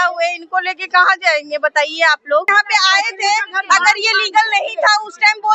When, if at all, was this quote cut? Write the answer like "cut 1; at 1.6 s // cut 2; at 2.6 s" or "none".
cut 1; at 2.5 s